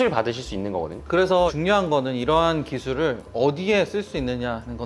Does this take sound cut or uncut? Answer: cut